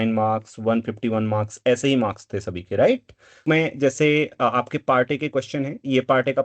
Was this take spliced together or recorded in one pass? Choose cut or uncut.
cut